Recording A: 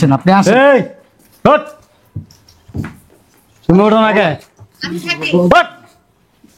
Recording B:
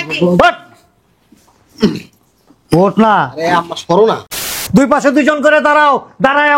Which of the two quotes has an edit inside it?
B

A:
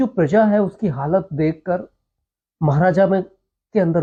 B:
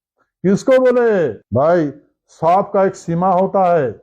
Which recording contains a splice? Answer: B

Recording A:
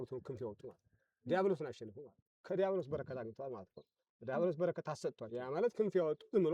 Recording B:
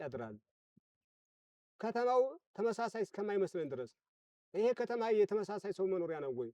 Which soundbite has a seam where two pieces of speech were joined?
A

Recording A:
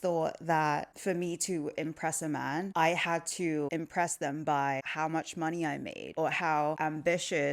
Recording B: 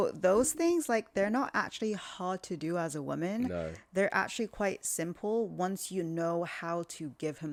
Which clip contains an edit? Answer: A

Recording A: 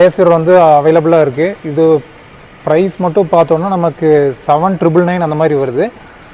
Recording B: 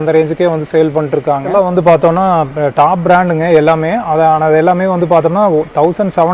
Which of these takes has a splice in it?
B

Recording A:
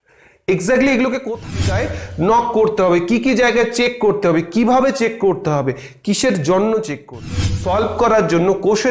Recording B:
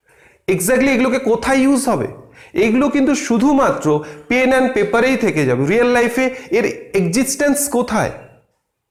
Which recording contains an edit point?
A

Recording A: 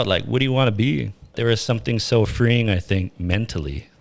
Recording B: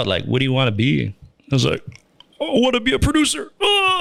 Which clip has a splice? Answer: A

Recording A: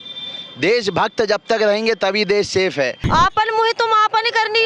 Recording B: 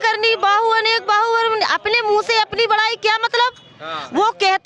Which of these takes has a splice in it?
A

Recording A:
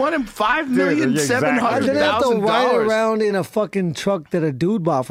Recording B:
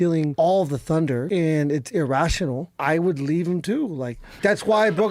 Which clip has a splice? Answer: B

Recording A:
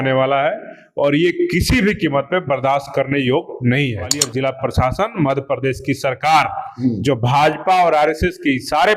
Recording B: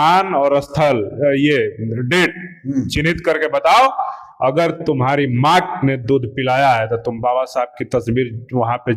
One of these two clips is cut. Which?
A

